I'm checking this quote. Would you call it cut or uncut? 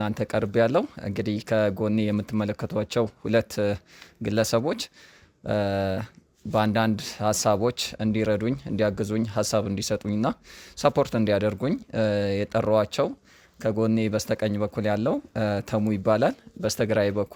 uncut